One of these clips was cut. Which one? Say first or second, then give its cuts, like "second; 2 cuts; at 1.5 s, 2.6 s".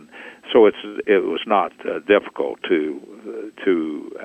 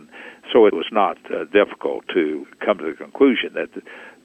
second; 2 cuts; at 0.8 s, 2.5 s